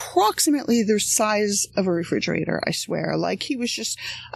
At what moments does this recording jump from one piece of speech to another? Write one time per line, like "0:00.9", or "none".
none